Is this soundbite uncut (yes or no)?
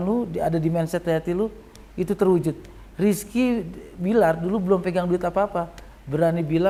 yes